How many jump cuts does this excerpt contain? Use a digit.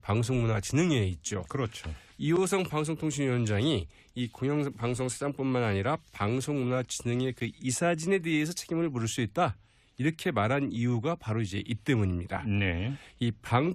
1